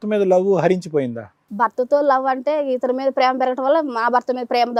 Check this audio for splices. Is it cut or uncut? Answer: uncut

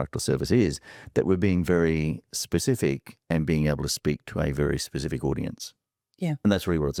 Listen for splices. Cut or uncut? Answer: uncut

